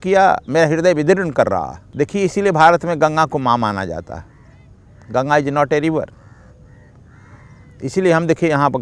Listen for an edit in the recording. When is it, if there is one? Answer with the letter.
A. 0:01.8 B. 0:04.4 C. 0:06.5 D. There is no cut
A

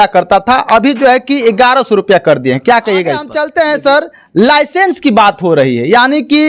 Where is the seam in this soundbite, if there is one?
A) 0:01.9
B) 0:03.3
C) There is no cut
B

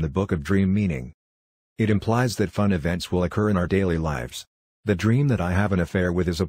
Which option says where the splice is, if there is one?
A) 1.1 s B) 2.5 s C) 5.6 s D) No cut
D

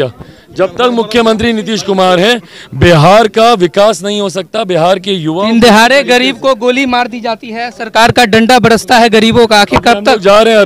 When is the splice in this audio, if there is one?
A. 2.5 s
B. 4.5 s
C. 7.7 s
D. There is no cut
D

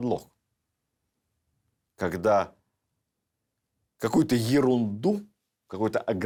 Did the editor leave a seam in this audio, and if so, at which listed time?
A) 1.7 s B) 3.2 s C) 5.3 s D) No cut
D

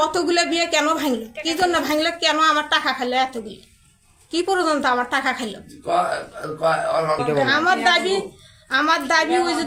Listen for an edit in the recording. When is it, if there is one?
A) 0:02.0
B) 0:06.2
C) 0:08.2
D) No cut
D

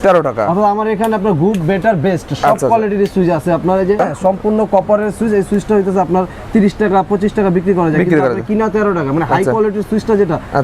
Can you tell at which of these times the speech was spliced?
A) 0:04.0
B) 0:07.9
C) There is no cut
A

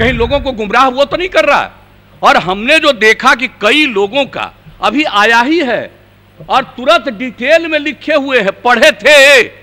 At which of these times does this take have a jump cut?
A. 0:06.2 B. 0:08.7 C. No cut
C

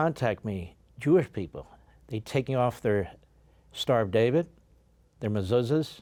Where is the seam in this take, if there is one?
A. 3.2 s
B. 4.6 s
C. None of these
C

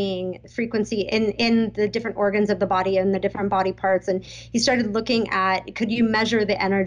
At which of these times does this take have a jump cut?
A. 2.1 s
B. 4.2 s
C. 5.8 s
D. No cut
D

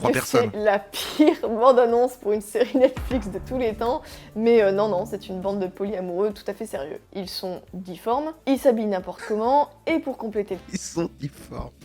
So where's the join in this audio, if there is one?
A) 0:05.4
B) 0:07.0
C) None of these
B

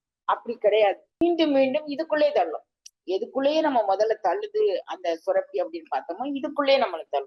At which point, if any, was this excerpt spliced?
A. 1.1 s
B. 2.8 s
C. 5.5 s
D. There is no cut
A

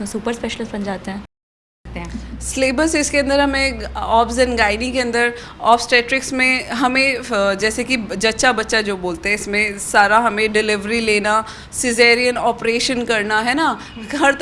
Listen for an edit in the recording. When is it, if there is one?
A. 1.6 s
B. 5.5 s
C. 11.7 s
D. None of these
A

